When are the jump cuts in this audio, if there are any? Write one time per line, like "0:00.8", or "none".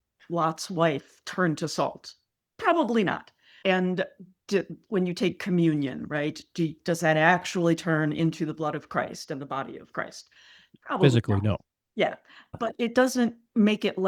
none